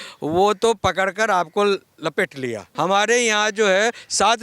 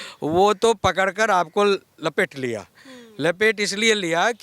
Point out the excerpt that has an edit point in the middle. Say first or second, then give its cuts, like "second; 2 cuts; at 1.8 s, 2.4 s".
first; 1 cut; at 2.7 s